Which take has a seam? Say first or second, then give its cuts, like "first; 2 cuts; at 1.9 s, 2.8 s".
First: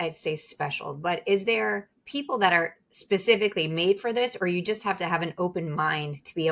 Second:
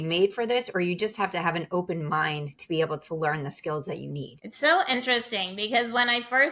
second; 1 cut; at 4.4 s